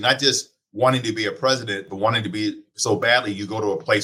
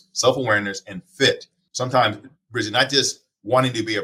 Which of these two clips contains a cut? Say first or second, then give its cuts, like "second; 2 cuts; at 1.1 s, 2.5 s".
second; 1 cut; at 1.6 s